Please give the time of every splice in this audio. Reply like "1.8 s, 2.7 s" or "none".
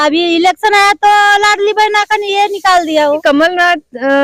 3.2 s